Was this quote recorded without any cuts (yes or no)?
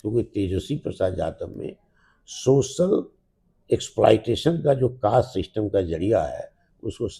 yes